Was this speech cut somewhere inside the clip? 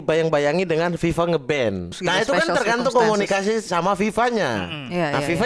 yes; 1 cut; at 1.9 s

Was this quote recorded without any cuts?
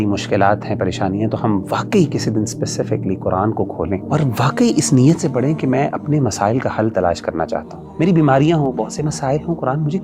no; 2 cuts; at 4.0 s, 7.8 s

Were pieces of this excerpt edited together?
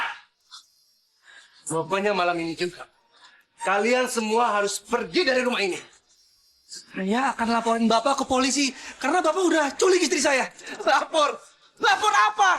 yes; 1 cut; at 6.2 s

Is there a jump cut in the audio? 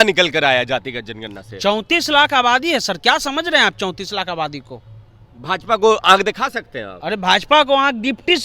no; 0 cuts

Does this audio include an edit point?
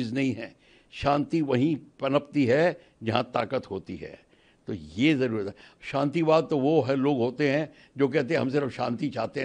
no; 0 cuts

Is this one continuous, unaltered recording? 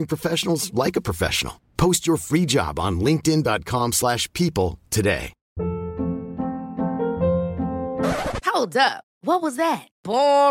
no; 1 cut; at 5.4 s

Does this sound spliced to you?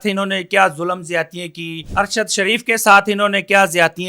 yes; 1 cut; at 1.8 s

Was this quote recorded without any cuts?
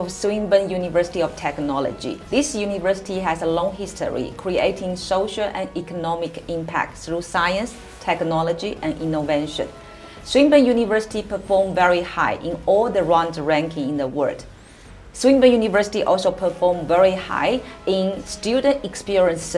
yes; 0 cuts

